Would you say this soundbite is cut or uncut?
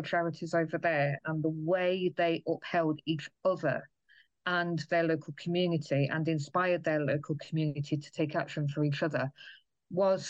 cut